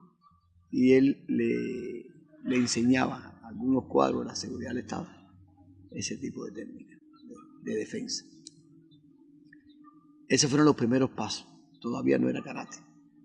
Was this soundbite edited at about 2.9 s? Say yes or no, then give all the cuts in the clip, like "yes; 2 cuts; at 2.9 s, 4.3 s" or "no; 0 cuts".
no; 1 cut; at 6.2 s